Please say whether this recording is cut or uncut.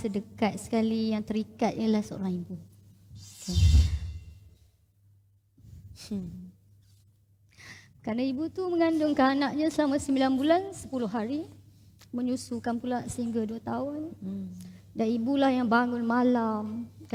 uncut